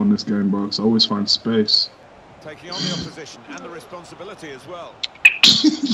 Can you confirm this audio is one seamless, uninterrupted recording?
no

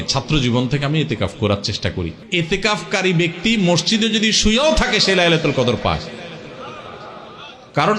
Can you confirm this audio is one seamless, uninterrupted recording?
no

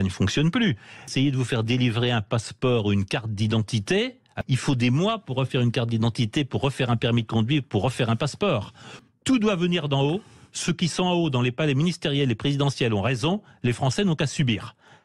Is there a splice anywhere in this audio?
yes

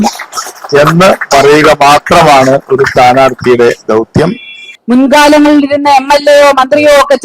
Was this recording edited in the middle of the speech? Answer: yes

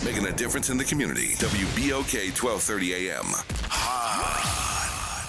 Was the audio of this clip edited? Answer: yes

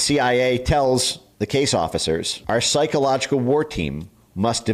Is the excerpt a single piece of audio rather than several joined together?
no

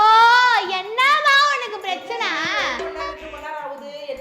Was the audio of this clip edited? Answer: yes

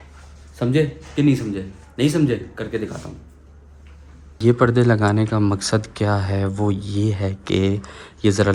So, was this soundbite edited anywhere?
no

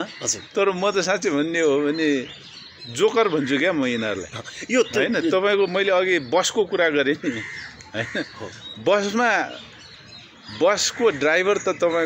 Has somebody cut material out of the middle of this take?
no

